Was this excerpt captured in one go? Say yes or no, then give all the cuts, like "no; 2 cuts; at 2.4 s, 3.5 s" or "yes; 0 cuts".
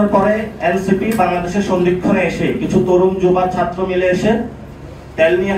yes; 0 cuts